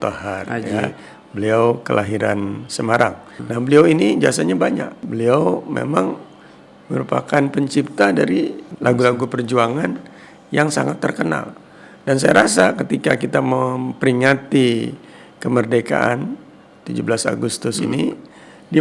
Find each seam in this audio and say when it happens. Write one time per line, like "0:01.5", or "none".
0:03.4
0:05.0
0:08.6

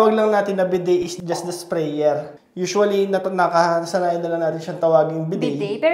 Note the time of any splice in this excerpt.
0:02.3

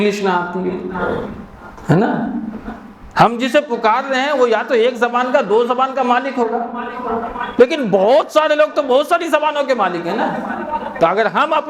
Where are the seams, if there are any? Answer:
none

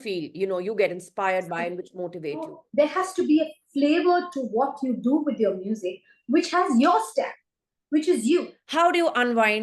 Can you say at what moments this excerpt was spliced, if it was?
0:02.6
0:08.6

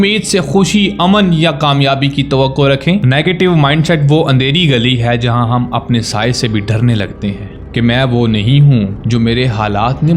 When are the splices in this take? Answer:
0:03.0
0:07.5

